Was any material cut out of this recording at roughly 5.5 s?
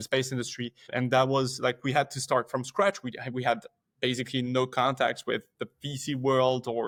no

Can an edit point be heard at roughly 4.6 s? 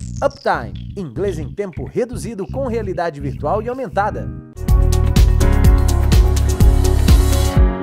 yes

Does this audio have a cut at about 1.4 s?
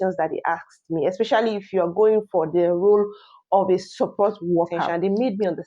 no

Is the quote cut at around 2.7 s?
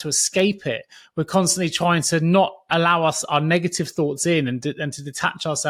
no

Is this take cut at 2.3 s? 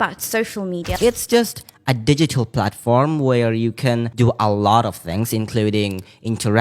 no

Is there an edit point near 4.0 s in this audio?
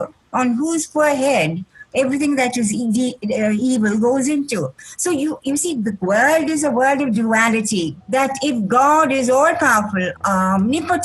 no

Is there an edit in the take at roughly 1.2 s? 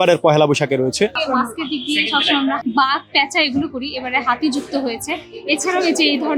yes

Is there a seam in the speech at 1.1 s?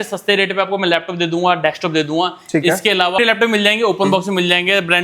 no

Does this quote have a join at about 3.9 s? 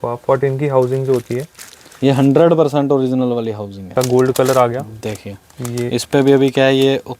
yes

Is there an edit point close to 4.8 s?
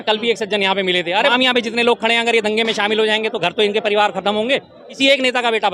yes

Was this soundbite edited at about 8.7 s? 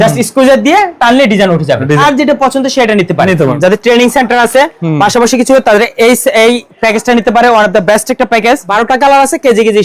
yes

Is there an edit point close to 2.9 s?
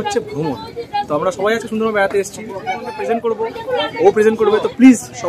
yes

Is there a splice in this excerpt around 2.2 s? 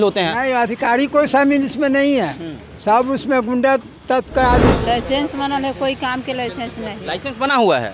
no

